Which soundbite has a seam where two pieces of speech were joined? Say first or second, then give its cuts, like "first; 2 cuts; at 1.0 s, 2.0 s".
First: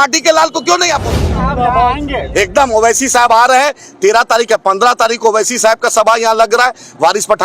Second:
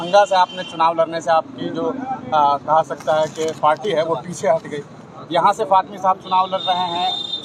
first; 1 cut; at 1.2 s